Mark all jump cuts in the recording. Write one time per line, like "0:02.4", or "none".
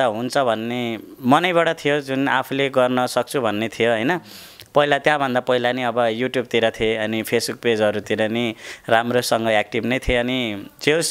none